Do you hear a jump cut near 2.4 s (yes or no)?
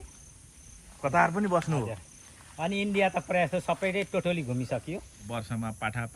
no